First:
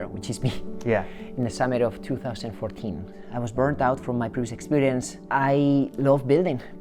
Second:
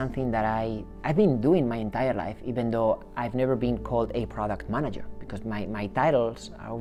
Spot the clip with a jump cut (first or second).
first